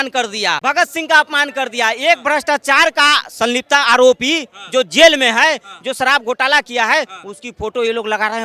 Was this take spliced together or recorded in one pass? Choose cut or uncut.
uncut